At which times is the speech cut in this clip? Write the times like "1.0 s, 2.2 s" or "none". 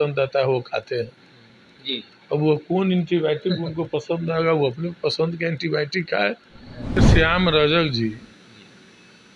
7.0 s

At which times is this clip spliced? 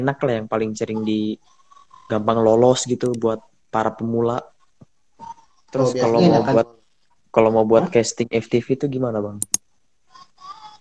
5.9 s

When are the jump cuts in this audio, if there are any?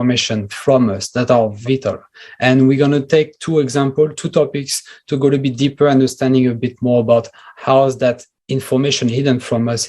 1.6 s

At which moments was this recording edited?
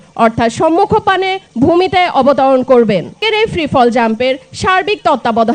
3.2 s

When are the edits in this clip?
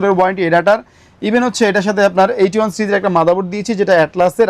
none

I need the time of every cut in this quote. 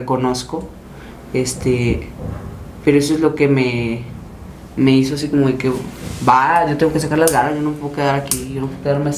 none

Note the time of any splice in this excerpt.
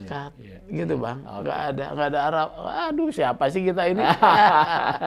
none

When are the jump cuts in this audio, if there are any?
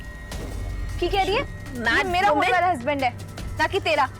1.8 s

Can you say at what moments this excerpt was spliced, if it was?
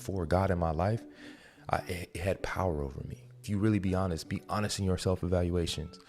3.4 s

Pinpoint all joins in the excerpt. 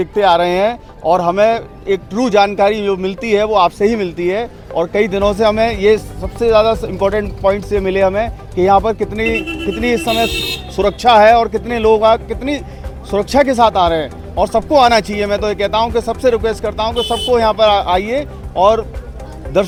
none

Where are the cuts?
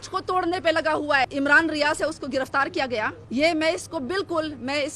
1.3 s, 3.2 s

